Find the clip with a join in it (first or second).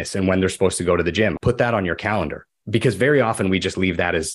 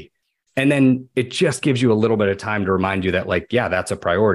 first